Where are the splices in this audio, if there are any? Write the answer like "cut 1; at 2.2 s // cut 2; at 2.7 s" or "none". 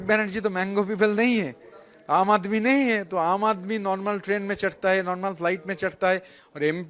none

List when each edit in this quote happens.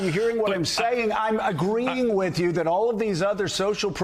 none

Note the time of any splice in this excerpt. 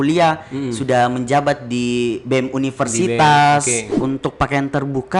cut 1; at 4.0 s

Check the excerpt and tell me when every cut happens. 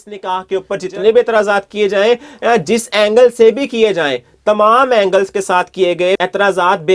none

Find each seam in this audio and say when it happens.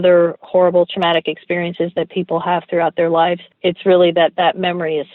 cut 1; at 3.5 s

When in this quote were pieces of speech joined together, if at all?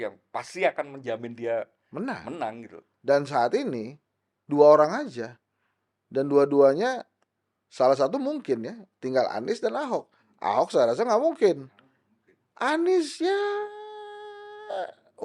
none

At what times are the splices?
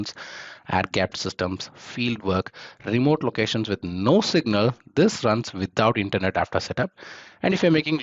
none

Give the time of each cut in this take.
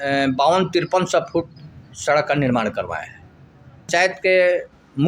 cut 1; at 3.9 s

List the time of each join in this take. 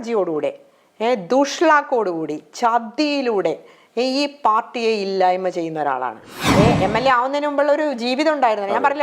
cut 1; at 6.3 s

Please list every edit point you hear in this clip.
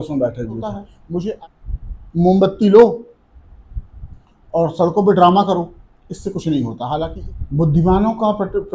cut 1; at 1.3 s // cut 2; at 7.2 s

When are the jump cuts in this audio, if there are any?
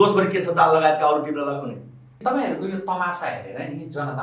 cut 1; at 2.1 s

